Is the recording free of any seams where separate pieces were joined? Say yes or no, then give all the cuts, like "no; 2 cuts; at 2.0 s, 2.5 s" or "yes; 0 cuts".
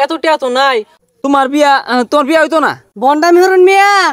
no; 2 cuts; at 1.0 s, 2.8 s